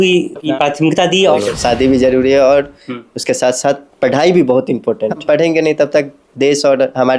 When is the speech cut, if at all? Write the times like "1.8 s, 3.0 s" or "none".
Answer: 1.4 s